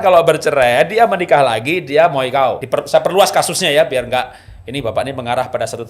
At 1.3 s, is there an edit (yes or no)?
no